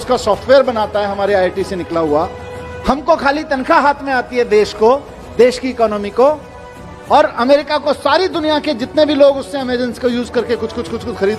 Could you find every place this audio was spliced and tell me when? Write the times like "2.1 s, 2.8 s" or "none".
none